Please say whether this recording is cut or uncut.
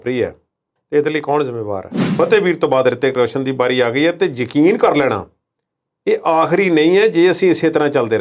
cut